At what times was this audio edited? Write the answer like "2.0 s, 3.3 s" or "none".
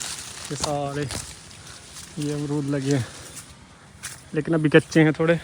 none